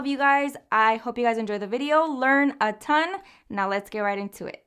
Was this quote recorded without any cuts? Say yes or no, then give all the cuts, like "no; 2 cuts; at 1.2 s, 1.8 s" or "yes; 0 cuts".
yes; 0 cuts